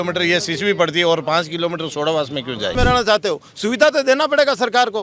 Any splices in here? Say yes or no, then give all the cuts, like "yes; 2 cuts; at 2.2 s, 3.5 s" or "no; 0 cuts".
yes; 1 cut; at 2.7 s